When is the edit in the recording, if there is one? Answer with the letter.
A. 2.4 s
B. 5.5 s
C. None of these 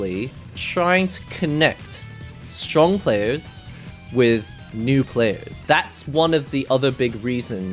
B